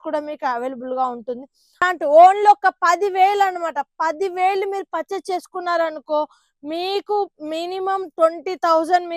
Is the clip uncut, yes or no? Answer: no